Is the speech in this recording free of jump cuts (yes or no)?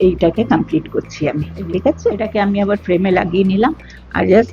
no